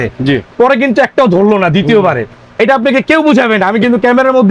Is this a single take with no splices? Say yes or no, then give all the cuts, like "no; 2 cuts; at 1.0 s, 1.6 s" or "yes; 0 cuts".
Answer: yes; 0 cuts